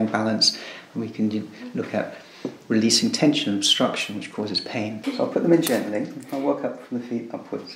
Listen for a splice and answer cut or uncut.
cut